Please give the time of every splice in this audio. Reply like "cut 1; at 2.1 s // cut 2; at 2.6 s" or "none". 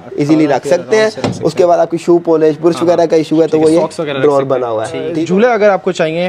cut 1; at 5.1 s